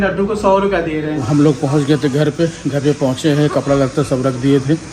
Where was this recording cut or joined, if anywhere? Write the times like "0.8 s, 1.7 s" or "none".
1.2 s